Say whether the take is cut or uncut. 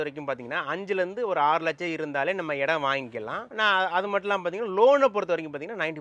uncut